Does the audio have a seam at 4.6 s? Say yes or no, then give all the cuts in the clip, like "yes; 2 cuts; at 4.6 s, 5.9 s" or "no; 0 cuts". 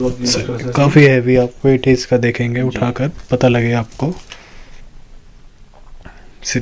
no; 0 cuts